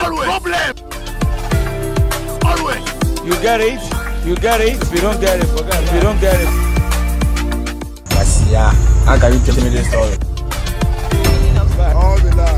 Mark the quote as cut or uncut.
uncut